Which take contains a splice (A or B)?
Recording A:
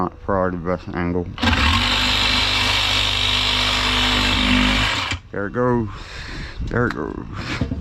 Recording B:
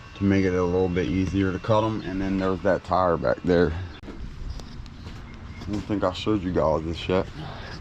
B